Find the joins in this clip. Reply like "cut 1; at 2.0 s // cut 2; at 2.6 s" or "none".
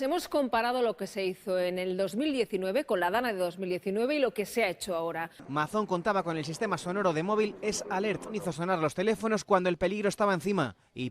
cut 1; at 5.4 s